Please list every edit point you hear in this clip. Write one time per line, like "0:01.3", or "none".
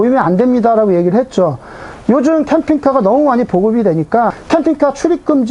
0:04.4